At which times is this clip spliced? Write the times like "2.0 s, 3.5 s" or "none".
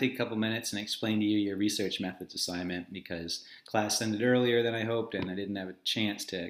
none